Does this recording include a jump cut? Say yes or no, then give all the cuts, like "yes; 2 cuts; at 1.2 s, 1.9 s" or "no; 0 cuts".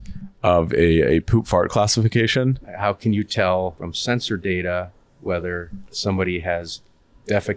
yes; 3 cuts; at 2.7 s, 3.9 s, 5.9 s